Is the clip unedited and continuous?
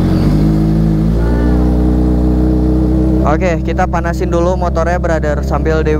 yes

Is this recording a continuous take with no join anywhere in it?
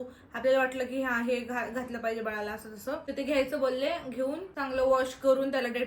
no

